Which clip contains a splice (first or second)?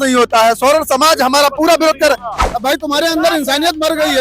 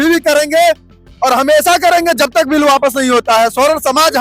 first